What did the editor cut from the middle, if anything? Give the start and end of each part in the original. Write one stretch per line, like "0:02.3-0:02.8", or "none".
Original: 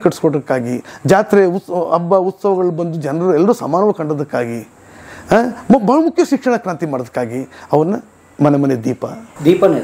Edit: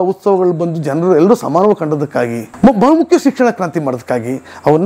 0:04.7-0:05.6